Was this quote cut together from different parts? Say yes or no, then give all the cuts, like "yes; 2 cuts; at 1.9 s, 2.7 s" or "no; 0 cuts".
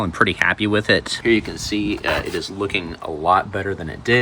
yes; 1 cut; at 1.1 s